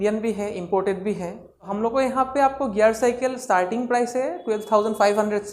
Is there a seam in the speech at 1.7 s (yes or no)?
yes